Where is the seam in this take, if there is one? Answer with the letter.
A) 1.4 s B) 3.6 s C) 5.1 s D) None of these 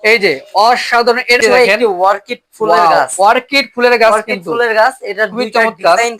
A